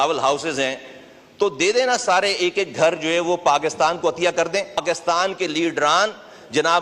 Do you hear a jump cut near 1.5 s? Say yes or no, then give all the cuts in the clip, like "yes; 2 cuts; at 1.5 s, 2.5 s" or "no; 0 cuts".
no; 1 cut; at 4.8 s